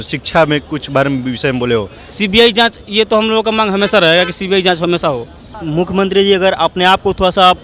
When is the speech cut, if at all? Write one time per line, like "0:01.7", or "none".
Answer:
0:02.1
0:05.6

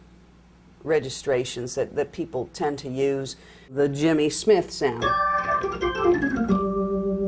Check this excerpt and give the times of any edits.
0:03.7

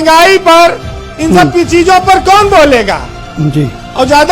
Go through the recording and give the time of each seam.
none

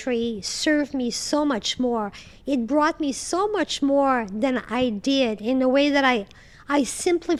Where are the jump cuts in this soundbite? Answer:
none

